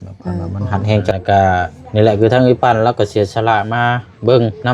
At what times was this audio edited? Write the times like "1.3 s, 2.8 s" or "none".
1.1 s